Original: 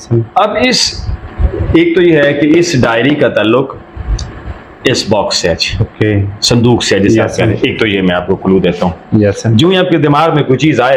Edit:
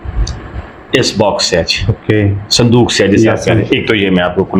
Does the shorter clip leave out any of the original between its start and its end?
no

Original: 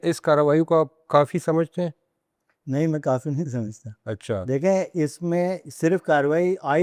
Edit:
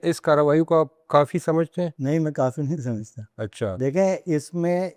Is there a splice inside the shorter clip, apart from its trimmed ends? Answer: yes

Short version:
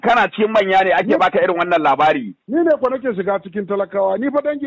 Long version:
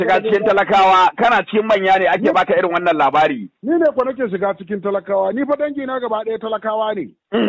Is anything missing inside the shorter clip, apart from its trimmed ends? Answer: no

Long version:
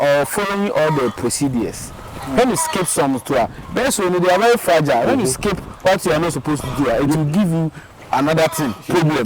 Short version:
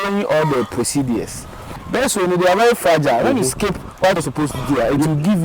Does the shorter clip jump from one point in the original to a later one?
yes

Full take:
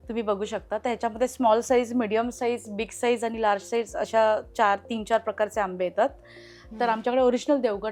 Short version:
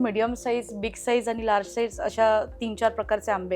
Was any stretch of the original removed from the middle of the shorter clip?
yes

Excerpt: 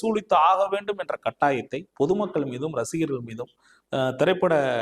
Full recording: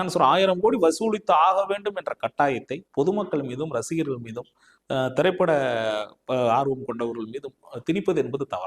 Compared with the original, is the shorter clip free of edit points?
yes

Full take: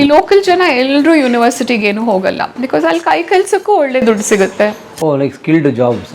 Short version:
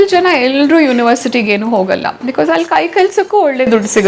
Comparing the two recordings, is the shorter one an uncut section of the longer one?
yes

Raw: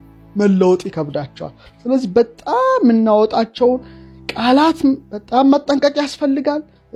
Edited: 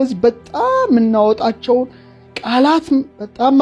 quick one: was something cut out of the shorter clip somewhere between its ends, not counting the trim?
no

